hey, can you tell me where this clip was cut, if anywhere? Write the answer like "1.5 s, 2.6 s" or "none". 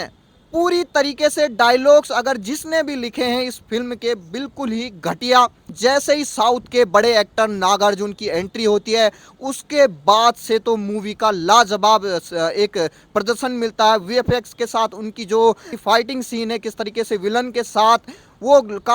5.7 s, 15.7 s